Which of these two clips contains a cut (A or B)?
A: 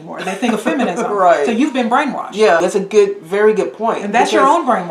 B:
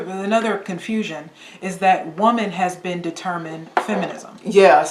A